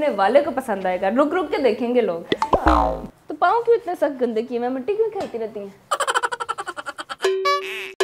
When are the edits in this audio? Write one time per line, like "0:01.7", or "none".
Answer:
0:03.1
0:07.1